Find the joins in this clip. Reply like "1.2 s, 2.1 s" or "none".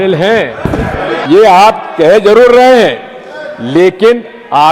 1.2 s